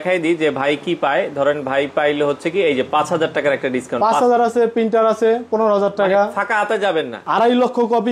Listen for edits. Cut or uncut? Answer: cut